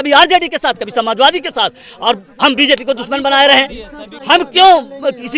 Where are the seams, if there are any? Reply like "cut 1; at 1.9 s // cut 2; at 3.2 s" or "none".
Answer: none